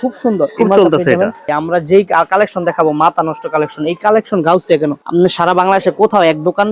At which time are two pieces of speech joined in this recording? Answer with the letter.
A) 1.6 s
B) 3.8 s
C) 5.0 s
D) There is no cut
A